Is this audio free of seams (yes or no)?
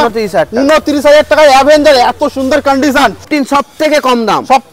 no